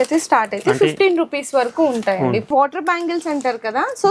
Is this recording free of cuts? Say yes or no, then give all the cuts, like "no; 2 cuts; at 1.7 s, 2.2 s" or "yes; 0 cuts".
no; 1 cut; at 2.5 s